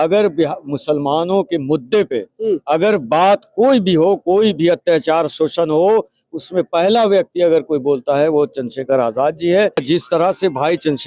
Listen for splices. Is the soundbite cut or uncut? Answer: cut